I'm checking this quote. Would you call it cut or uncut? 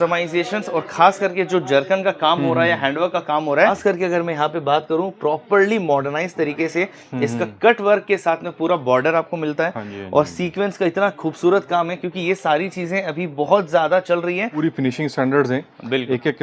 cut